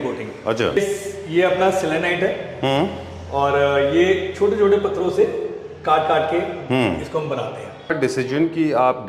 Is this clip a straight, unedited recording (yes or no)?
no